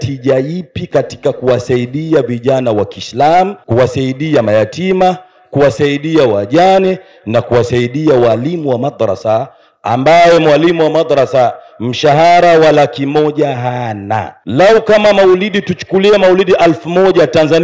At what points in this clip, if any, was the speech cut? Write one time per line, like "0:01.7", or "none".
0:03.6
0:14.4